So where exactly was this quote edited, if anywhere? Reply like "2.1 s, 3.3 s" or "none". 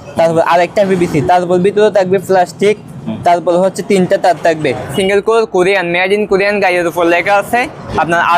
4.9 s